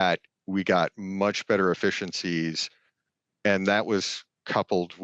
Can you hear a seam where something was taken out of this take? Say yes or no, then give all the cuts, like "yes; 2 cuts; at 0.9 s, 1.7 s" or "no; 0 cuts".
no; 0 cuts